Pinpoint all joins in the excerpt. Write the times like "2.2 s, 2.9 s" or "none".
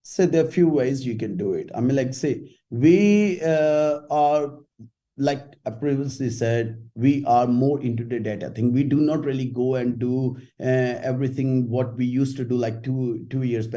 none